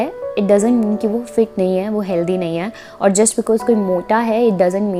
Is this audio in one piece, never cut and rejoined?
yes; 0 cuts

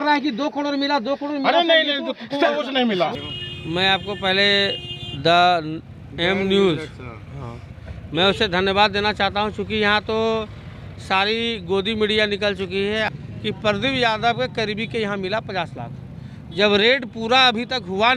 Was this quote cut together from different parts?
yes; 2 cuts; at 3.1 s, 13.1 s

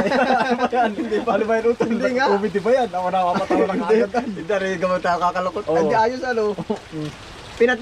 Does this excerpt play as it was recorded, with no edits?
yes; 0 cuts

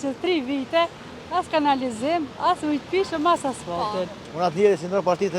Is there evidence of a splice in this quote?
yes; 1 cut; at 4.2 s

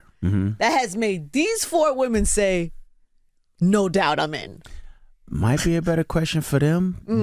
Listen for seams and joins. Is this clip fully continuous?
yes; 0 cuts

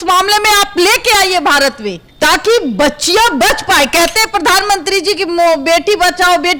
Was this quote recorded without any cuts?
yes; 0 cuts

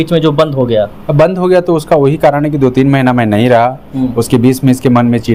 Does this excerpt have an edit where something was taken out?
no; 0 cuts

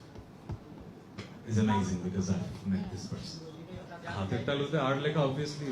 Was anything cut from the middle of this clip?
yes; 1 cut; at 4.0 s

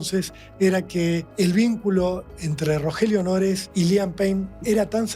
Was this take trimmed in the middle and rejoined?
yes; 2 cuts; at 1.3 s, 3.6 s

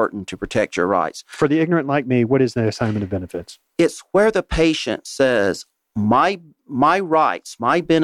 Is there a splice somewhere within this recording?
no; 0 cuts

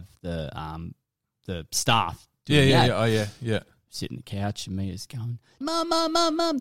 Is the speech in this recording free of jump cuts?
no; 1 cut; at 5.5 s

